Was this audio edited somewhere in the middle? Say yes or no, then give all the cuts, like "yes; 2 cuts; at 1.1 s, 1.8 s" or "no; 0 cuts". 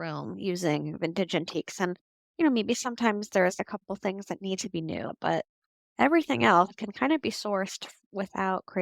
yes; 1 cut; at 5.1 s